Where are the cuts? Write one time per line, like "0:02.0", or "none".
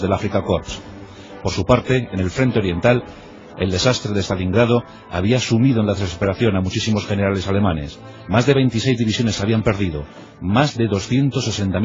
0:09.2